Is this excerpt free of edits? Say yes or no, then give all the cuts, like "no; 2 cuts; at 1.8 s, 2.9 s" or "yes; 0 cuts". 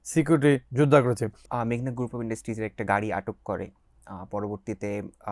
no; 1 cut; at 1.4 s